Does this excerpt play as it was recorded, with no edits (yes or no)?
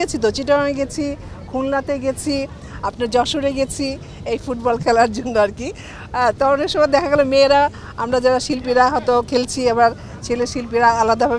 yes